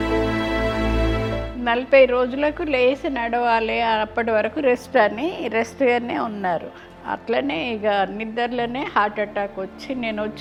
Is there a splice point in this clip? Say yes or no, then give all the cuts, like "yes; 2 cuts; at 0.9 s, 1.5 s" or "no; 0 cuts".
no; 0 cuts